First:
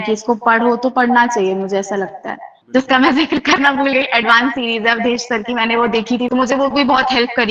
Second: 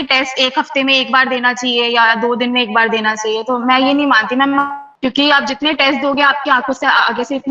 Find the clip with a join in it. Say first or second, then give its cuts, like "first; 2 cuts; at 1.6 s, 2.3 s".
first; 2 cuts; at 2.5 s, 6.3 s